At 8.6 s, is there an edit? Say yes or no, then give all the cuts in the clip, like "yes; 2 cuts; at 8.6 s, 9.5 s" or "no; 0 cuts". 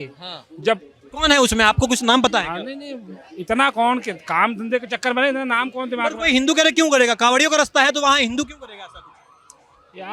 no; 0 cuts